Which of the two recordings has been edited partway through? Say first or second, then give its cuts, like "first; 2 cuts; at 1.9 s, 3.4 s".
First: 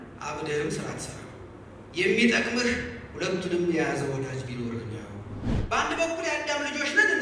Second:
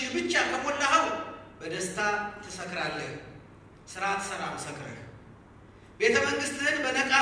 first; 1 cut; at 5.4 s